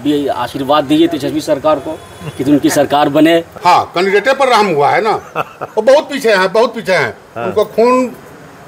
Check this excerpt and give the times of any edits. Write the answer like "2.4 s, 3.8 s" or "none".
3.5 s